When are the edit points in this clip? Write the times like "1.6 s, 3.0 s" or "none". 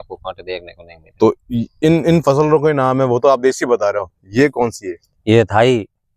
none

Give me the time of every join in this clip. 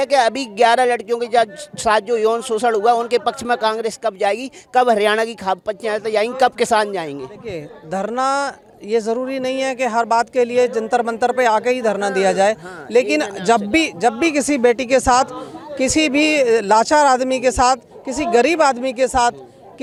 none

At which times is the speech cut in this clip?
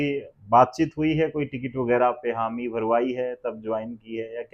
none

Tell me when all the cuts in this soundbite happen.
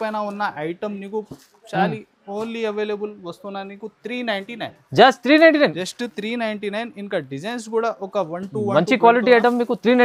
none

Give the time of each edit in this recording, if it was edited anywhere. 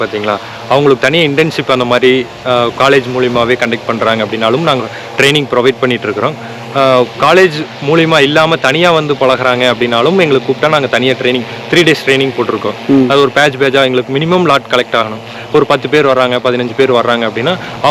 none

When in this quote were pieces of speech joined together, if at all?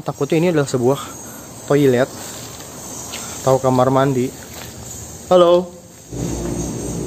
6.1 s

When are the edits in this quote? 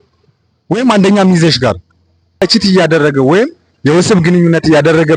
2.4 s

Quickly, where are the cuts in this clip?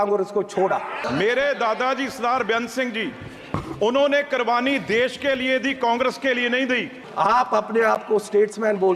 1.0 s, 7.0 s

